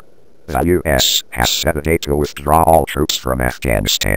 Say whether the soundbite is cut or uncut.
uncut